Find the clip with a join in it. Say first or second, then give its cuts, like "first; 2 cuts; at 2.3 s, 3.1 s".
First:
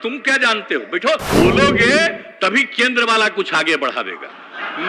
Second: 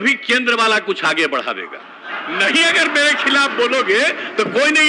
first; 1 cut; at 1.2 s